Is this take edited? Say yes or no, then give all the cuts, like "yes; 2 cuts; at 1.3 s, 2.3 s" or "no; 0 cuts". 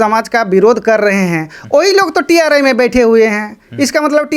no; 0 cuts